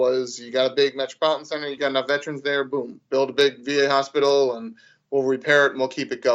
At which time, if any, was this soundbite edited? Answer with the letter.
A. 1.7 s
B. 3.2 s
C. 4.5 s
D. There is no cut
A